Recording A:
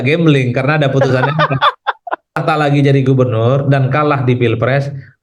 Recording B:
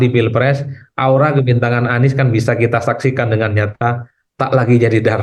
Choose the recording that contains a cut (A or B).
A